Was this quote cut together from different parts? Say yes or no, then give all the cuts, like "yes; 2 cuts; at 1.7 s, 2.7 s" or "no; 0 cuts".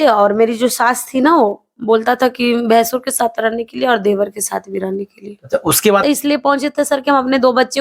yes; 1 cut; at 6.0 s